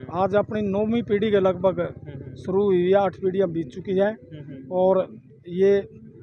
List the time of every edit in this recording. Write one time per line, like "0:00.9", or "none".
none